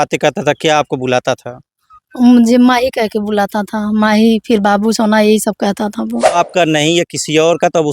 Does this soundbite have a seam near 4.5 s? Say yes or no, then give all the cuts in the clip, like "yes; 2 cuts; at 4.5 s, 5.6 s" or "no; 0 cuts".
no; 1 cut; at 6.3 s